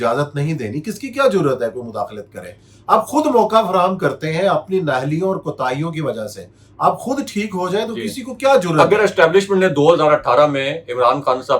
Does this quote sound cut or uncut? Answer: uncut